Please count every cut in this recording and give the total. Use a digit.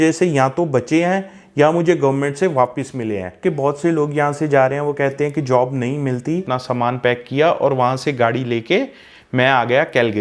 2